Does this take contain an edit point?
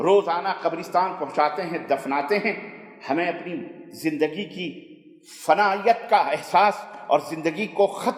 no; 0 cuts

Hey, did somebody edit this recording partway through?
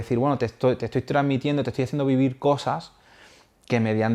no; 0 cuts

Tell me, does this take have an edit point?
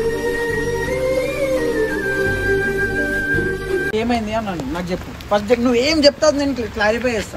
no; 0 cuts

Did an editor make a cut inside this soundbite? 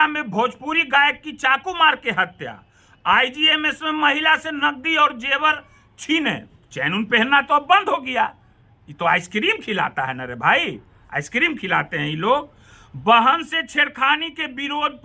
no; 0 cuts

